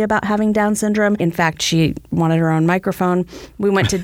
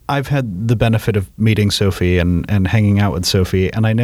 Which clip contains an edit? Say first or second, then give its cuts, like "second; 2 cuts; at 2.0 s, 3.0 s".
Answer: first; 1 cut; at 1.2 s